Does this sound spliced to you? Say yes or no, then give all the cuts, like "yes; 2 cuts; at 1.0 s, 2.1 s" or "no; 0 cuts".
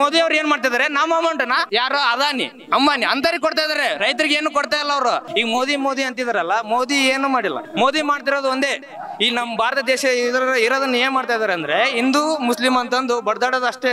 yes; 3 cuts; at 1.7 s, 5.3 s, 7.6 s